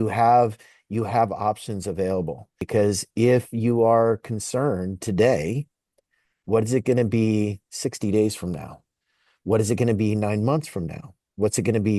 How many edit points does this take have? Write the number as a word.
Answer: one